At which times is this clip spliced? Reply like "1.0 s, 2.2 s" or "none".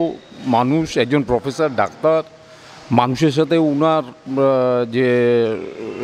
none